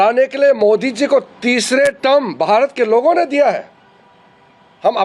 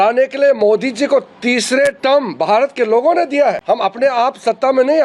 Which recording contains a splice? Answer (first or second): second